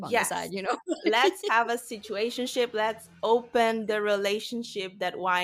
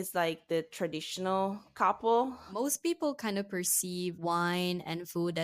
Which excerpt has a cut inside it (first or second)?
second